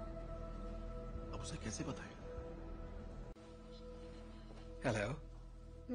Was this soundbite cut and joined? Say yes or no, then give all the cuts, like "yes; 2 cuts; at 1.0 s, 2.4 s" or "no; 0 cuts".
no; 0 cuts